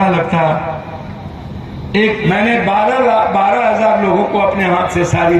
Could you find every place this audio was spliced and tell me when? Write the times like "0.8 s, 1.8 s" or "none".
2.2 s